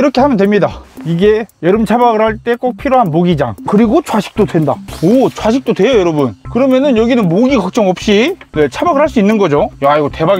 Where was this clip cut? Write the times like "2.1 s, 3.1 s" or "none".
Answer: none